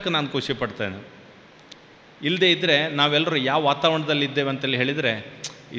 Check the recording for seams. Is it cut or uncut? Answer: uncut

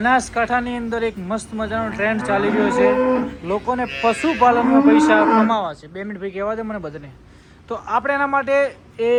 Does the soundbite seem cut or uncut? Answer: uncut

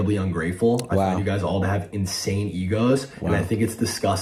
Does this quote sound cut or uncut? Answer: uncut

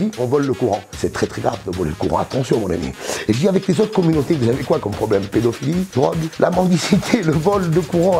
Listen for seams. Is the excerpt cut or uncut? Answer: cut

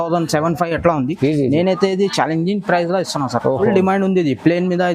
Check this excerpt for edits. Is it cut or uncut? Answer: cut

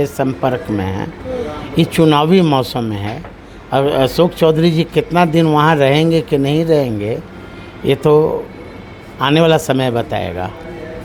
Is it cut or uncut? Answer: uncut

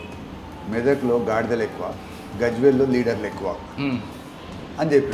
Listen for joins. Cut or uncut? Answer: uncut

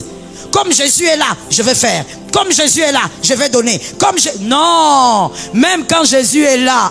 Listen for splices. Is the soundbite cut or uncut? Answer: uncut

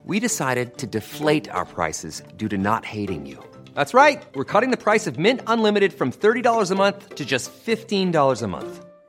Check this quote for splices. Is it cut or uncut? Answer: uncut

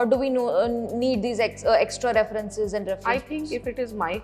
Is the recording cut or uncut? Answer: uncut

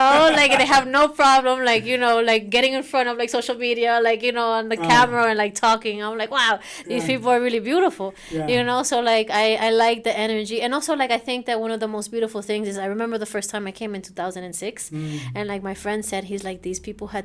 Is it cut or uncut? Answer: uncut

